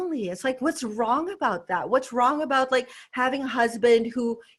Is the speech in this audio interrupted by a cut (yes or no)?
no